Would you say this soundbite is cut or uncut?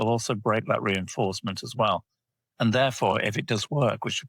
uncut